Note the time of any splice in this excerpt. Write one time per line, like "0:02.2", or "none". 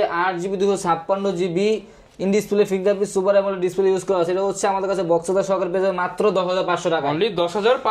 none